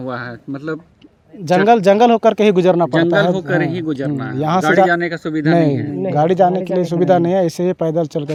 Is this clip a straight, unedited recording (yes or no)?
yes